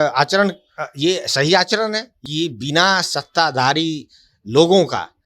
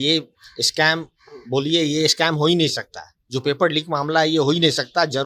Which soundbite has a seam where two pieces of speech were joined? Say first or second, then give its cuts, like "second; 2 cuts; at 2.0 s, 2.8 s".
first; 1 cut; at 2.1 s